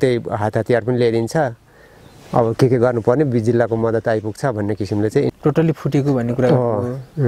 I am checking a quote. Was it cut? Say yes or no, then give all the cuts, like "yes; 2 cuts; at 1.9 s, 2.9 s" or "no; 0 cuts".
yes; 1 cut; at 5.3 s